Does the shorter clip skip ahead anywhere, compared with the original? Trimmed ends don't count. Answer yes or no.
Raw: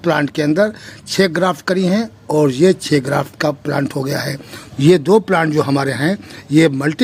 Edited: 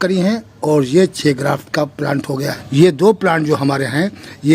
yes